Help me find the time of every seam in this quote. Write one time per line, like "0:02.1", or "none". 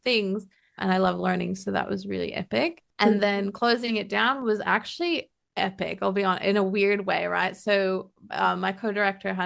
0:02.8
0:05.4